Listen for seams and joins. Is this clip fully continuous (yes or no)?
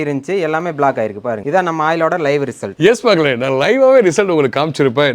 yes